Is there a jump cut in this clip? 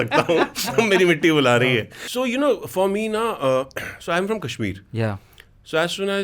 yes; 1 cut; at 1.9 s

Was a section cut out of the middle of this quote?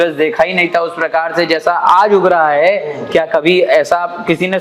no; 0 cuts

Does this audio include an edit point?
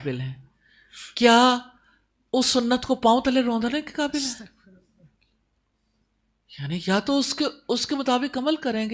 no; 0 cuts

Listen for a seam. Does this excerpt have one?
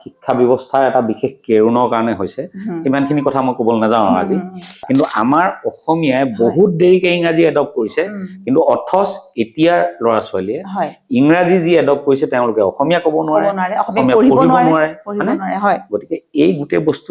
yes; 1 cut; at 4.8 s

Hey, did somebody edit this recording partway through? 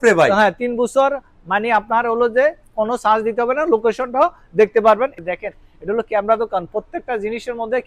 yes; 1 cut; at 5.2 s

